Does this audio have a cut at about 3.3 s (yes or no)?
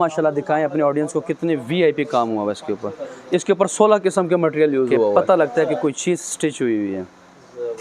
no